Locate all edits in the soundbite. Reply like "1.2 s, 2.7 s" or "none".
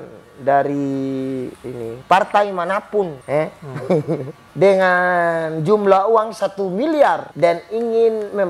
3.2 s, 4.4 s, 7.3 s